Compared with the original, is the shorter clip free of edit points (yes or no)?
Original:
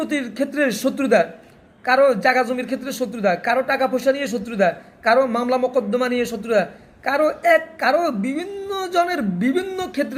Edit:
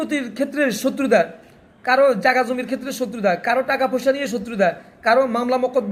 yes